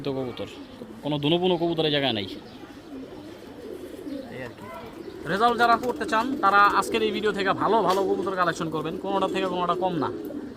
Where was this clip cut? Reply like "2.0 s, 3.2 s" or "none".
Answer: 5.2 s

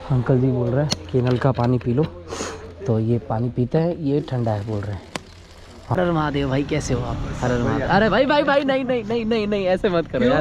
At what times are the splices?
6.0 s

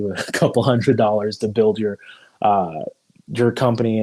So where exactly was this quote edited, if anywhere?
none

